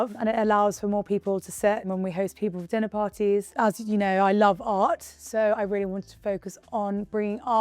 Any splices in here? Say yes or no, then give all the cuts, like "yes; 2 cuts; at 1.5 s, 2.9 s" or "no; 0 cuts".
yes; 1 cut; at 3.5 s